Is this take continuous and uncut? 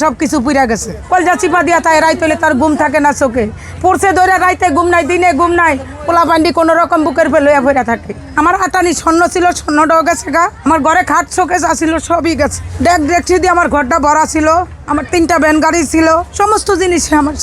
no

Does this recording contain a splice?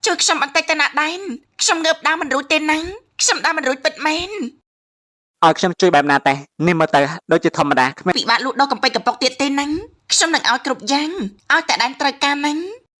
yes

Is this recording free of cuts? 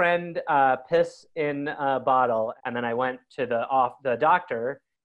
no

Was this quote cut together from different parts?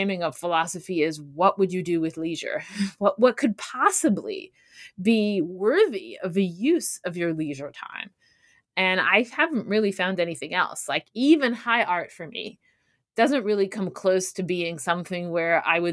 no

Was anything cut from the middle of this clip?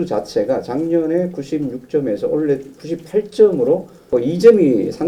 no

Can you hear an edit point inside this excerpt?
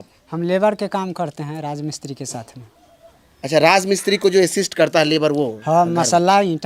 no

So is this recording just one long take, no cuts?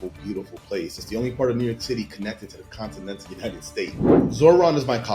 no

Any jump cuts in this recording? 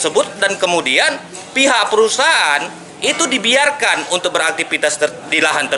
no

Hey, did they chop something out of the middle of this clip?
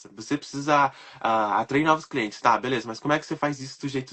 no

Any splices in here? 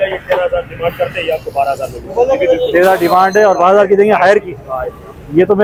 no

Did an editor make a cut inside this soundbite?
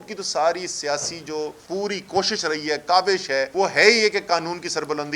yes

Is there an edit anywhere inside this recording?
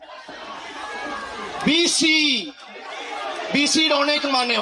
no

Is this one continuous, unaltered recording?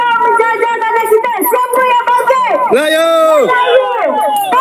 yes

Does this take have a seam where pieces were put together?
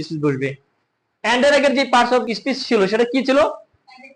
yes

